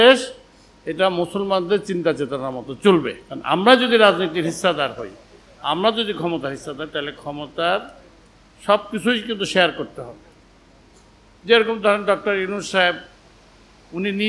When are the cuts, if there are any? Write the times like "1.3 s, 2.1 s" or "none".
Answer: none